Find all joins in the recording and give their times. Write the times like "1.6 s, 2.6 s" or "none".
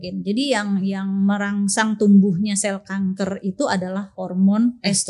none